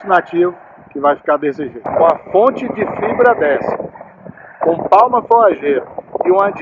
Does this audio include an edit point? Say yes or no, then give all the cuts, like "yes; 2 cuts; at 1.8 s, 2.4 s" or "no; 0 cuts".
yes; 1 cut; at 1.7 s